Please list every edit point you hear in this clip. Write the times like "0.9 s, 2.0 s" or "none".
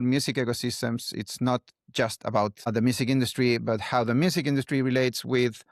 none